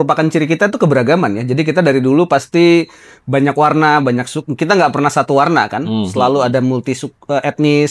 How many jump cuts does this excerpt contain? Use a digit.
0